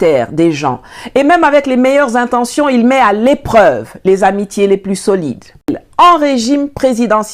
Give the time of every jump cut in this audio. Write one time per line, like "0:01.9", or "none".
0:05.8